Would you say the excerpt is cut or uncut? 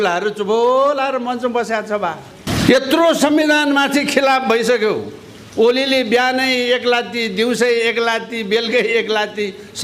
cut